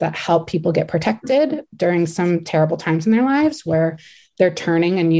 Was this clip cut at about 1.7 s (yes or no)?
no